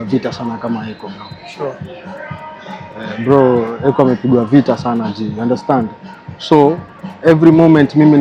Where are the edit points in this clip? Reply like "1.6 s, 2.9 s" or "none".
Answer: none